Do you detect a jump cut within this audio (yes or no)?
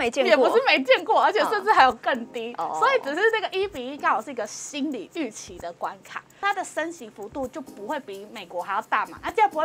yes